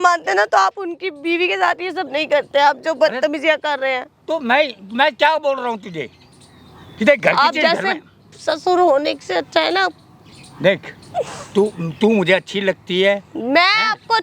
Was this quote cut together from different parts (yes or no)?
no